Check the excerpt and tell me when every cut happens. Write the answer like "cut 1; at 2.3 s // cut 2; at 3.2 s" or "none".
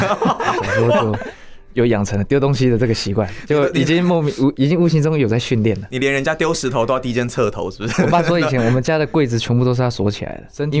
cut 1; at 1.0 s